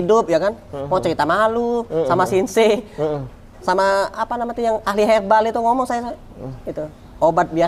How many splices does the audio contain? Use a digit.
0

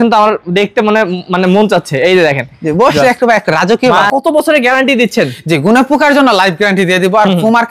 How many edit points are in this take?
1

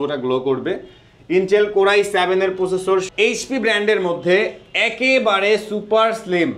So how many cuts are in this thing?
1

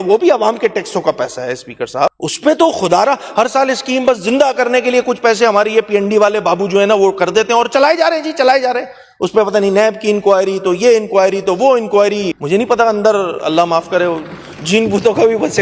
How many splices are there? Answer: 2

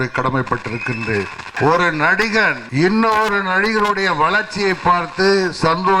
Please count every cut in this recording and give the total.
2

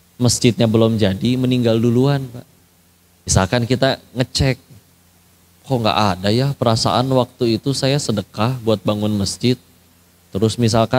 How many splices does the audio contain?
1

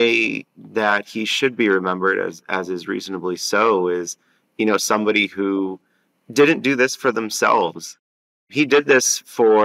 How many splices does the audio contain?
1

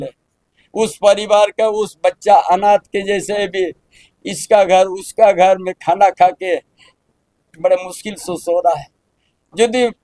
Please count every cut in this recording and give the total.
0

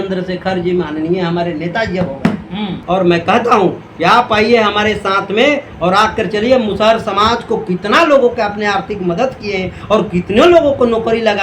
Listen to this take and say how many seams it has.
1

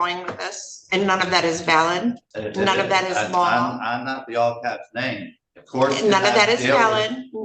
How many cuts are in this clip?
1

